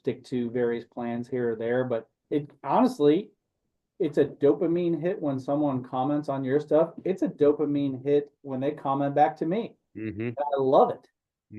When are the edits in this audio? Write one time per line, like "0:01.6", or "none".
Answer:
0:02.1